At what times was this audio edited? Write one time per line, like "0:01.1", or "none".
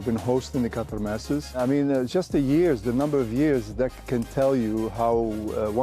none